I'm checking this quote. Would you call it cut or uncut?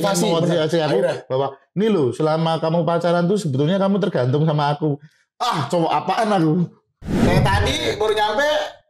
cut